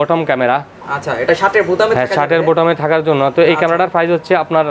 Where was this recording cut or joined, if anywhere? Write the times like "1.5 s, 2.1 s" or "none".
none